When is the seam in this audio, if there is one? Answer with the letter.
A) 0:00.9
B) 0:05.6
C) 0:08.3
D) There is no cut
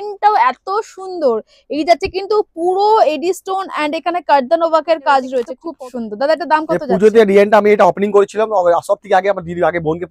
B